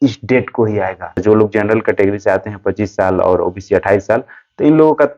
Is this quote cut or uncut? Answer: cut